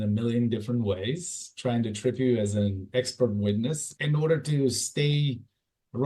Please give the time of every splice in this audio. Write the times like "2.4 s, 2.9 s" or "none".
3.9 s